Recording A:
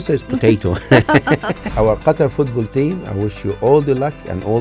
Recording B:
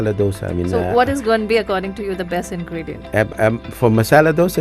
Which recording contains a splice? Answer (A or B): A